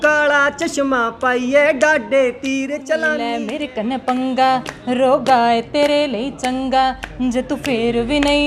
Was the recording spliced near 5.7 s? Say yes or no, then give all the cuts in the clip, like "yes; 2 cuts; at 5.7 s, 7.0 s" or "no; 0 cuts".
no; 1 cut; at 3.4 s